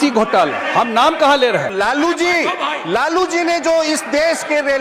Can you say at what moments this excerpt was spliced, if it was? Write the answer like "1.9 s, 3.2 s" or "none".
1.7 s